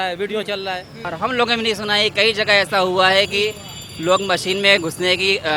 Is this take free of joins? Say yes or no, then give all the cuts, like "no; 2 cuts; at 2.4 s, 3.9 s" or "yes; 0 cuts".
no; 1 cut; at 1.1 s